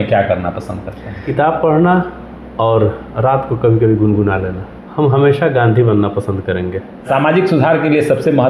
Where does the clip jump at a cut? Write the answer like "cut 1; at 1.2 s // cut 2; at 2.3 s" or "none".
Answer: cut 1; at 1.3 s // cut 2; at 4.5 s // cut 3; at 7.1 s